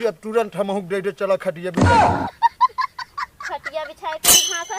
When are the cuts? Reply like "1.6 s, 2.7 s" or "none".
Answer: none